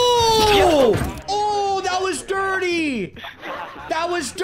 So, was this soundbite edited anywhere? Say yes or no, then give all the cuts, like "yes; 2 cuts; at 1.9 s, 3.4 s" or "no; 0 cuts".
yes; 1 cut; at 1.2 s